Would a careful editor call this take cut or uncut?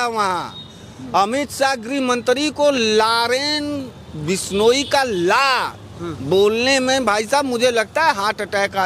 uncut